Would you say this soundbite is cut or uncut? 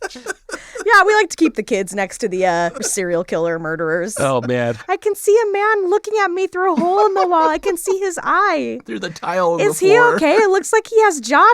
cut